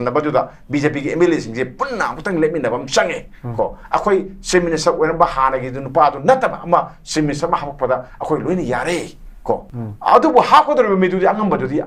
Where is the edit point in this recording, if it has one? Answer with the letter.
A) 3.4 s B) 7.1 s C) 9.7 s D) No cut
C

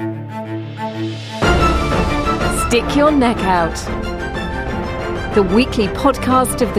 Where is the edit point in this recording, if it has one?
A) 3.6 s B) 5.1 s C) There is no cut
C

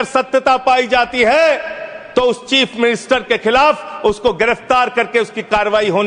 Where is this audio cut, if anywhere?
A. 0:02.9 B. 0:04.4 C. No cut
C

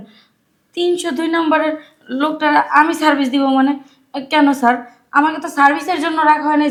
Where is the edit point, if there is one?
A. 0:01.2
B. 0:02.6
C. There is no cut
C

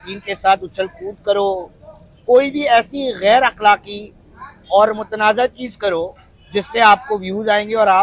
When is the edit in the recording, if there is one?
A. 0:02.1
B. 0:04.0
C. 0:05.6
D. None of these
D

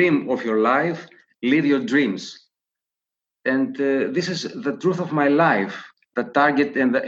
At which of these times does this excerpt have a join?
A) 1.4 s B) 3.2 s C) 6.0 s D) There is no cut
D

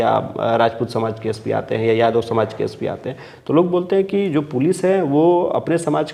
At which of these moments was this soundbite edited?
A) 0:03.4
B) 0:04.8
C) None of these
C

